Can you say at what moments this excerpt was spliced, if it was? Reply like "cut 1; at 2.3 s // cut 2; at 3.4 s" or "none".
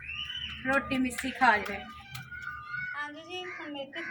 cut 1; at 2.8 s